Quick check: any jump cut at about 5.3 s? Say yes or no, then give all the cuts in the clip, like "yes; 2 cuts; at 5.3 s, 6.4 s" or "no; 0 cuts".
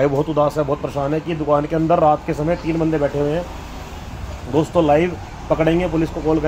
no; 0 cuts